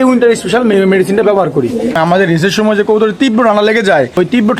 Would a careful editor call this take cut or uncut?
cut